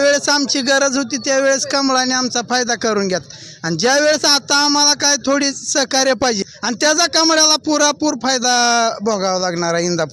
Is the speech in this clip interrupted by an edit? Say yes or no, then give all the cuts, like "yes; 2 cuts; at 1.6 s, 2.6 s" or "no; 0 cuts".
yes; 1 cut; at 6.5 s